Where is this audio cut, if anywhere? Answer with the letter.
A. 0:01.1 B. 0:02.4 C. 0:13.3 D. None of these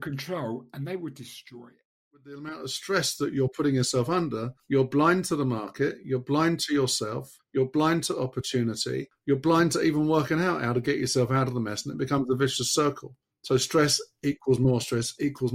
B